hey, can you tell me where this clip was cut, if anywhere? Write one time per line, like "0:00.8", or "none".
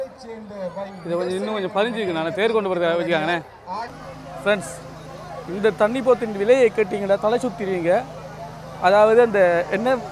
0:03.9